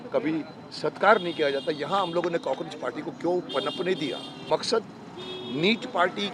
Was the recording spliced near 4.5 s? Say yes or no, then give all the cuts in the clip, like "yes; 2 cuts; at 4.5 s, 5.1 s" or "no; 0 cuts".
yes; 1 cut; at 4.5 s